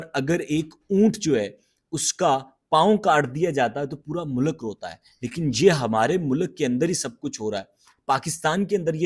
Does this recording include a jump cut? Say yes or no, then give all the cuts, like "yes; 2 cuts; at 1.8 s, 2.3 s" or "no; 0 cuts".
no; 0 cuts